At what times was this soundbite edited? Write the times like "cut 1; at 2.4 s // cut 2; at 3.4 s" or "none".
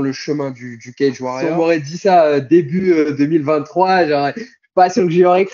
cut 1; at 1.3 s

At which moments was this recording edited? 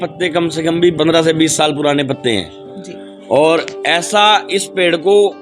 cut 1; at 0.9 s

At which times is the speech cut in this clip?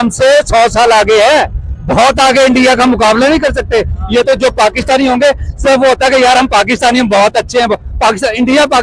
cut 1; at 4.0 s

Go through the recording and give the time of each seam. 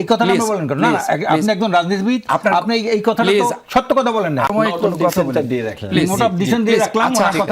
cut 1; at 4.5 s

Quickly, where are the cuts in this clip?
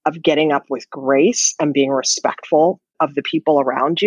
cut 1; at 2.9 s

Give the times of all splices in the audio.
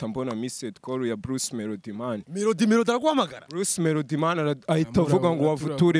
none

